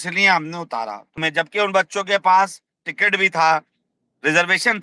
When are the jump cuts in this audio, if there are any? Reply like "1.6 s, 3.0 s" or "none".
1.2 s

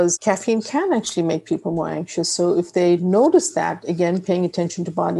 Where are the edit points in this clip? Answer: none

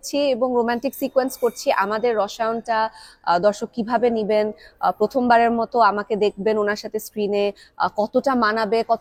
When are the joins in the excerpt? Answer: none

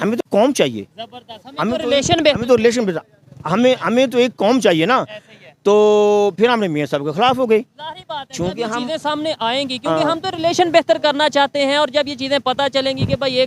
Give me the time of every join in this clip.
none

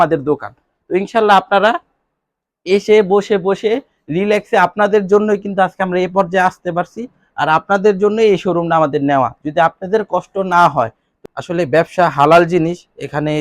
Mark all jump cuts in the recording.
11.1 s

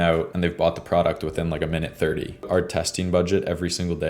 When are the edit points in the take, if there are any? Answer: 2.5 s

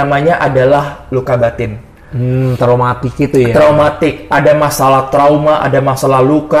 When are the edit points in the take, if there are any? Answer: none

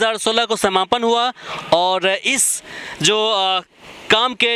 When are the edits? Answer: none

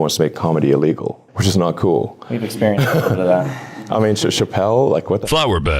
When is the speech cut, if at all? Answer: 1.3 s

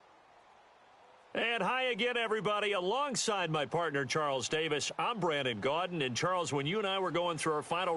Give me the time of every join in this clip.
1.3 s

